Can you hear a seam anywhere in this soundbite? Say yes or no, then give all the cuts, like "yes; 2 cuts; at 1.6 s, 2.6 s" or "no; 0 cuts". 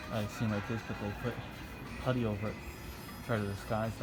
no; 0 cuts